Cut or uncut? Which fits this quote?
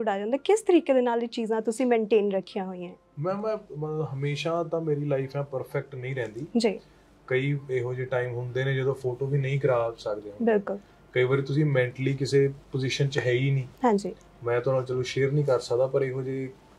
uncut